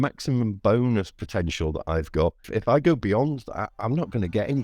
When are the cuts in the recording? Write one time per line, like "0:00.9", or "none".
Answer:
0:02.4